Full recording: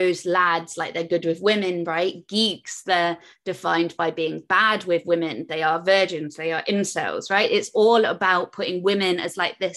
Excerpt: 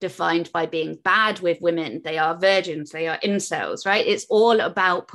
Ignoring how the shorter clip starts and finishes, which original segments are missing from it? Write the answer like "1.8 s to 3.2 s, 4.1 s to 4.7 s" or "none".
none